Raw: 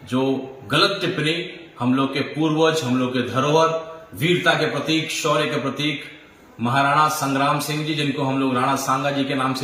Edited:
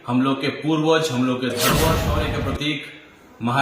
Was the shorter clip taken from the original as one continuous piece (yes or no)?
no